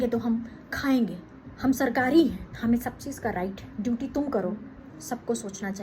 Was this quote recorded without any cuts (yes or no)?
no